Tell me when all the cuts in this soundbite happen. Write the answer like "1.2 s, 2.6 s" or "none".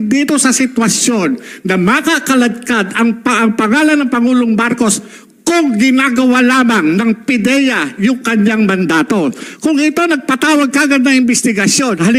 none